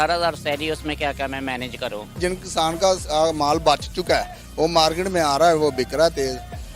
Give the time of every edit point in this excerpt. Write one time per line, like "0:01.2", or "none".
0:02.2